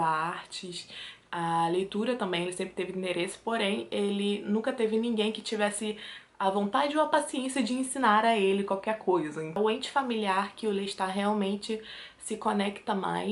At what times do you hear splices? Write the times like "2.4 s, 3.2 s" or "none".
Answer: 9.5 s